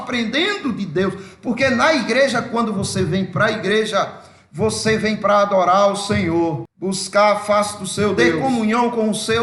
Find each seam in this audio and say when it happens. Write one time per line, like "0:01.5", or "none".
0:06.7
0:08.4